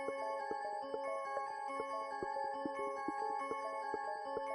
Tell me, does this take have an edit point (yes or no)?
yes